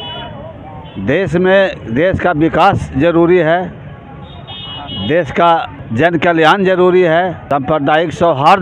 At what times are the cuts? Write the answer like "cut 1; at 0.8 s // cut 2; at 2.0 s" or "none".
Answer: cut 1; at 5.8 s // cut 2; at 7.4 s

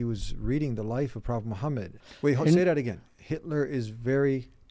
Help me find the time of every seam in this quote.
cut 1; at 2.0 s

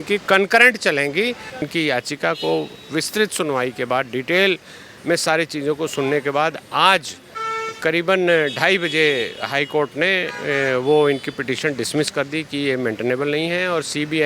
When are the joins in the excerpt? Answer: cut 1; at 1.7 s

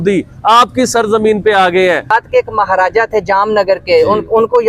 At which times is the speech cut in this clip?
cut 1; at 2.1 s

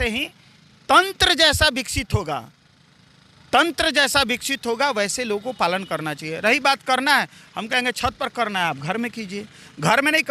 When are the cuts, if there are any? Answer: none

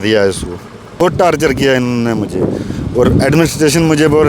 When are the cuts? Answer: cut 1; at 1.0 s

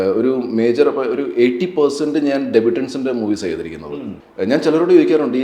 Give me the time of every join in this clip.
cut 1; at 4.2 s

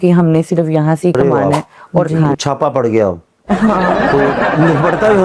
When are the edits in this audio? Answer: cut 1; at 2.3 s

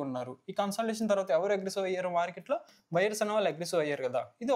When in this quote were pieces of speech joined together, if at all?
none

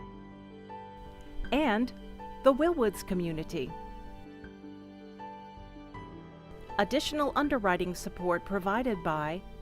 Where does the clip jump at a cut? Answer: cut 1; at 1.1 s // cut 2; at 4.1 s // cut 3; at 6.8 s

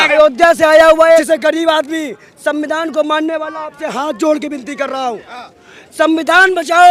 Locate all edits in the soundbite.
cut 1; at 1.2 s

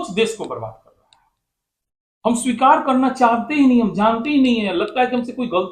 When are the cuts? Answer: none

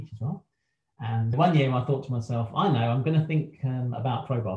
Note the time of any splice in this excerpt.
cut 1; at 1.1 s

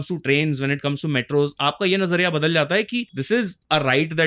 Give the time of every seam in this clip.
cut 1; at 3.3 s

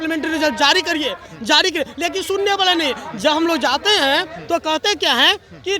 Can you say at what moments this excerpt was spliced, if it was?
none

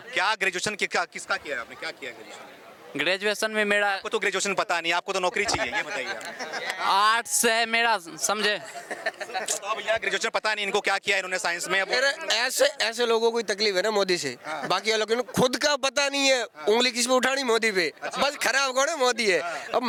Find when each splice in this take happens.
none

